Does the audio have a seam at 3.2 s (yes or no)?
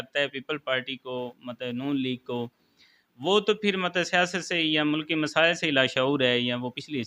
no